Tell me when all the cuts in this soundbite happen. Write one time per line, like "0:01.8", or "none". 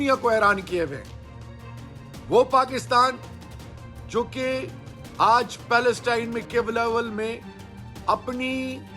none